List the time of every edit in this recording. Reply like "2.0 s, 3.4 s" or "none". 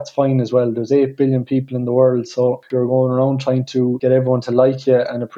2.6 s, 4.0 s